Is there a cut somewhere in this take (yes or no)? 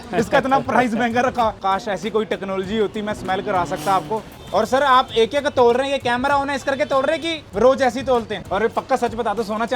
yes